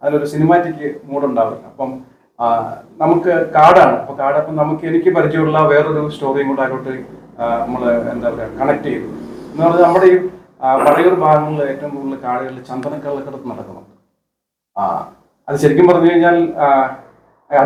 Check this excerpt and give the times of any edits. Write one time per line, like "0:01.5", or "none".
none